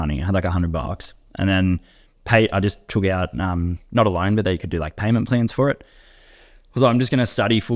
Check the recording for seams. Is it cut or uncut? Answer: uncut